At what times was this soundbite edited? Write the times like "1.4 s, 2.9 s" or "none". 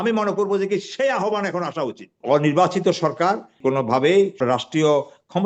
2.2 s, 3.5 s, 4.4 s